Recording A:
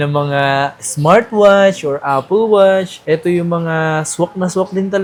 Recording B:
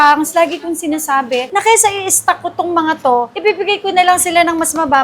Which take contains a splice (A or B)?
B